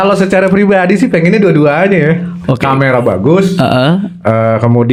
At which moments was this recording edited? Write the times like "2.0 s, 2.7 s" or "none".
none